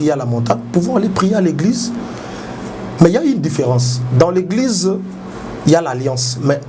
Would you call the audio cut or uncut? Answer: uncut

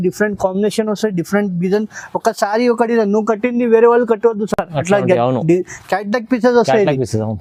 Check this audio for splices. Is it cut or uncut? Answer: uncut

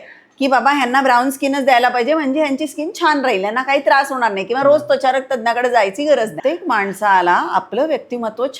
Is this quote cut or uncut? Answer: cut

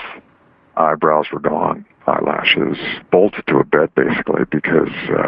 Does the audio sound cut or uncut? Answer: uncut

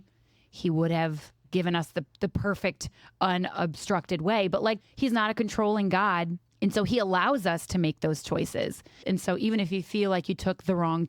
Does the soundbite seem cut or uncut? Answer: cut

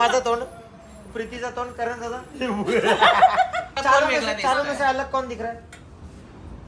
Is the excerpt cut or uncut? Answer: uncut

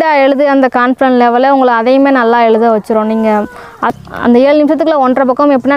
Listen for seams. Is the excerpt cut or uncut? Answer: cut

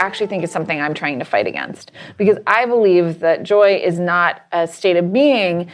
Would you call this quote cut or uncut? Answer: uncut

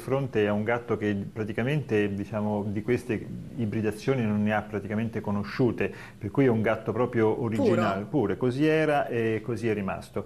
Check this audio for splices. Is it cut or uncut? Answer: cut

